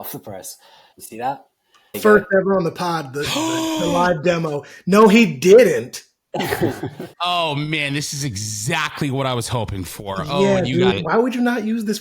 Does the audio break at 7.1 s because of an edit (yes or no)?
yes